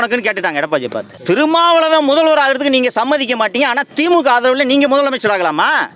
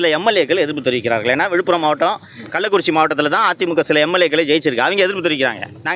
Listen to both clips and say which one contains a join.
first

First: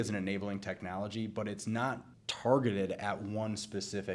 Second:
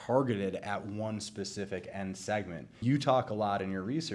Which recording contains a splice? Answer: second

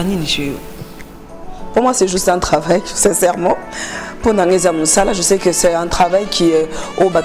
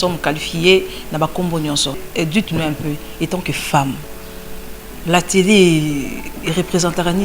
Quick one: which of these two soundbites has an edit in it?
second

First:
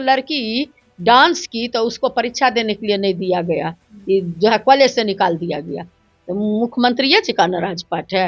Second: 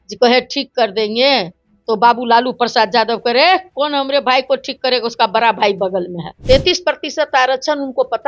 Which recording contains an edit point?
second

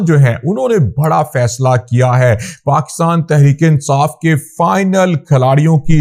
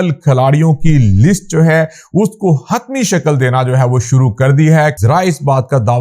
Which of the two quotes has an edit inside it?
second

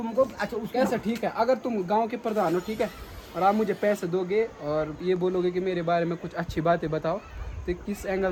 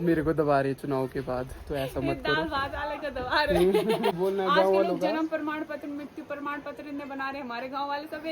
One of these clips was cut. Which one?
second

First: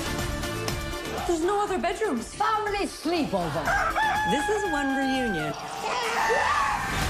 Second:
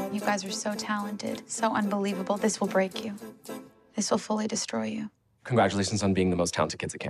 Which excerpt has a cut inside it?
first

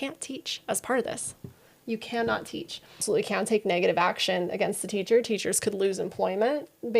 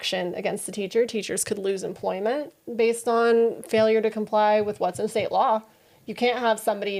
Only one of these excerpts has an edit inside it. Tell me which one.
first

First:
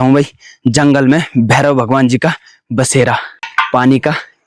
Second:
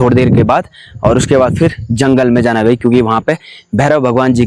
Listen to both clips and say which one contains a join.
first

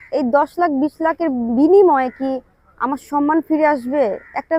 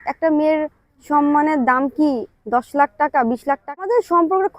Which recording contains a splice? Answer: second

